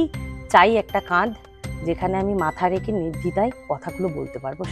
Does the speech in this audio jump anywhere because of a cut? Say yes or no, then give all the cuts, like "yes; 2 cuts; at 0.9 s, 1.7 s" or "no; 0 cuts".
no; 0 cuts